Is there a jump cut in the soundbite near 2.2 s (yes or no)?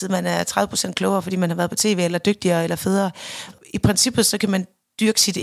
no